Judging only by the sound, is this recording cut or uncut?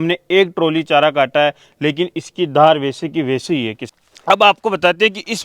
cut